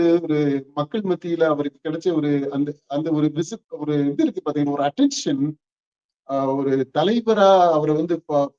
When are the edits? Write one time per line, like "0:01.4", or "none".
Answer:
none

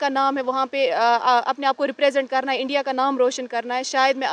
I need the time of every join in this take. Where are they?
none

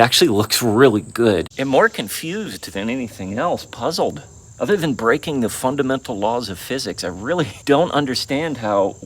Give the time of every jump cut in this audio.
0:01.5

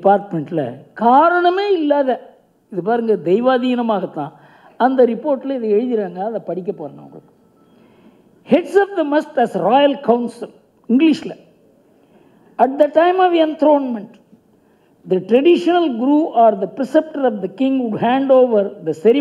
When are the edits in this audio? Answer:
none

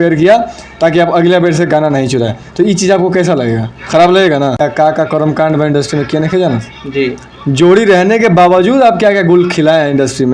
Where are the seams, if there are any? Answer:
0:04.6

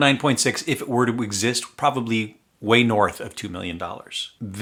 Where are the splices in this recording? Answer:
none

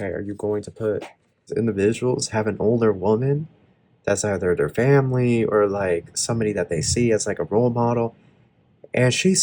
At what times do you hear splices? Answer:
0:01.5

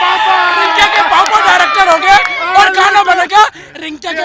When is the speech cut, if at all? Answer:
none

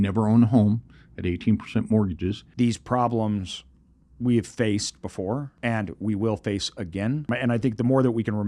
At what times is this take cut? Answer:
0:02.4
0:05.5
0:07.3

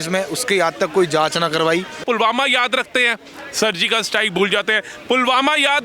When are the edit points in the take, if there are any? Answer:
0:01.9

